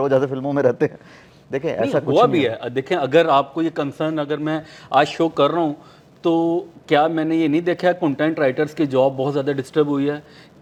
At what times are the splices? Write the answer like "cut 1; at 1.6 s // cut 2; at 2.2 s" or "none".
none